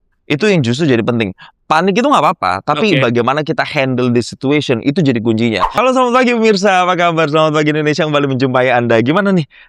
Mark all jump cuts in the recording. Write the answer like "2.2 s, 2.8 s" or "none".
5.7 s